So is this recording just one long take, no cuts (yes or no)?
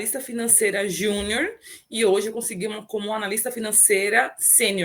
yes